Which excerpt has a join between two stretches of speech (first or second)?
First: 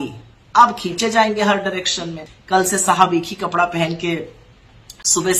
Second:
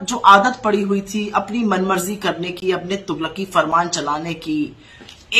first